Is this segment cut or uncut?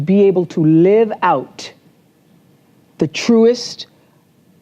uncut